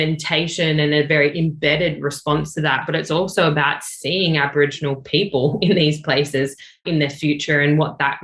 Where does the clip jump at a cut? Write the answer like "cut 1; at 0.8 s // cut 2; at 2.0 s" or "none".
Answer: none